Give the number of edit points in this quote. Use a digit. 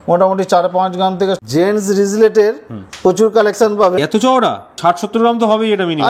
2